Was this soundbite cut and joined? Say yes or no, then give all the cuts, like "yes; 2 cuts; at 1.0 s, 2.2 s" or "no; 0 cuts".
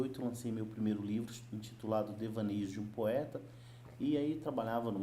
no; 0 cuts